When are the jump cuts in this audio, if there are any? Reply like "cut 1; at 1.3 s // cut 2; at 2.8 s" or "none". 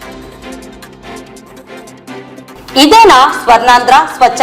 cut 1; at 1.1 s // cut 2; at 1.8 s